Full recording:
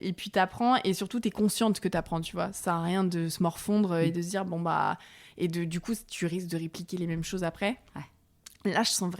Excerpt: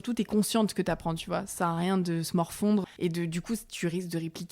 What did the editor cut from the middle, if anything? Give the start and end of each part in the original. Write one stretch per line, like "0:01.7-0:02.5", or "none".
0:03.9-0:05.2